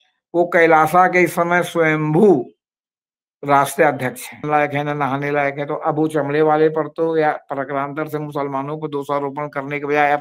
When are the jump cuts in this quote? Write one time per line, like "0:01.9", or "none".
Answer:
0:04.4

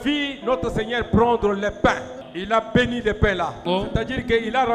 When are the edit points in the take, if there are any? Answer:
0:02.3
0:03.6

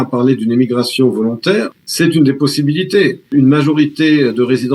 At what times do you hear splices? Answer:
0:01.8
0:03.3

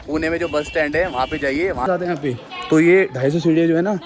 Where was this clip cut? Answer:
0:01.9

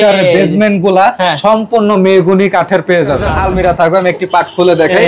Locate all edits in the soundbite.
0:03.3

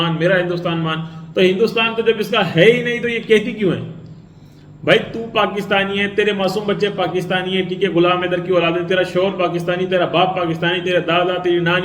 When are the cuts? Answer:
none

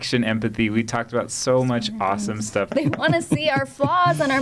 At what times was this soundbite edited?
0:02.7

